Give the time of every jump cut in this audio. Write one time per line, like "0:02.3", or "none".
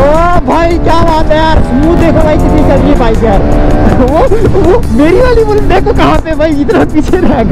none